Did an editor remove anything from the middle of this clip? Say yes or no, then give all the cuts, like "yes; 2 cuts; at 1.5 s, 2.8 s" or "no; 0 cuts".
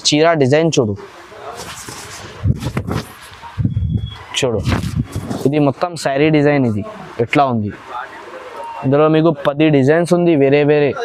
no; 0 cuts